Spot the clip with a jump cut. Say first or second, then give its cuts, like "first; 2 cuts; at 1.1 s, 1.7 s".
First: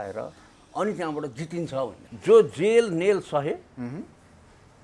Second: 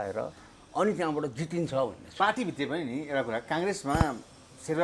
first; 1 cut; at 2.0 s